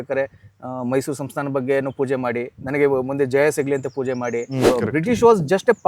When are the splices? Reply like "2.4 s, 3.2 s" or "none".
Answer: 4.6 s